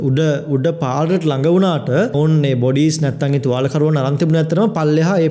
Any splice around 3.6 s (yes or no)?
no